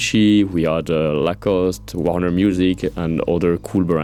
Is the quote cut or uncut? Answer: uncut